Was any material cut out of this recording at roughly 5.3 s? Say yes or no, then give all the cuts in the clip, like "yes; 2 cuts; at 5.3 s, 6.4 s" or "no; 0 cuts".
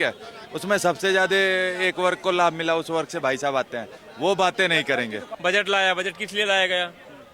yes; 1 cut; at 5.3 s